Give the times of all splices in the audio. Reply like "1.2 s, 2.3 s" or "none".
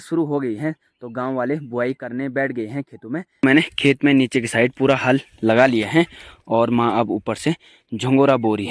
3.4 s